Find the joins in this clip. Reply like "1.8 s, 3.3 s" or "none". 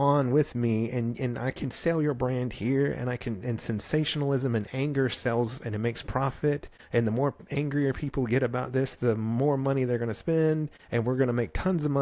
6.7 s, 10.8 s